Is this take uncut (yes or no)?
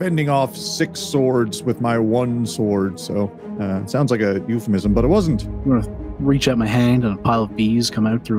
no